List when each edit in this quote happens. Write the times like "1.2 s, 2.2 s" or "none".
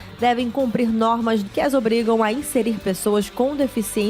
1.4 s